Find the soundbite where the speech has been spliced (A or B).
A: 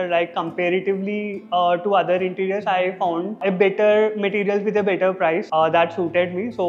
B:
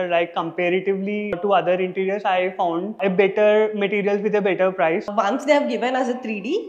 B